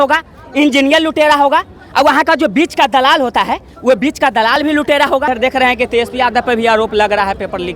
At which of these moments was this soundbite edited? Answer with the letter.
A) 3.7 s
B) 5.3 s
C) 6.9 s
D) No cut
B